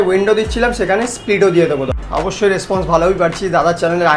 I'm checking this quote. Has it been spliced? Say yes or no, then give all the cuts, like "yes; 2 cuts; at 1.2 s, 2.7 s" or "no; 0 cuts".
yes; 1 cut; at 1.9 s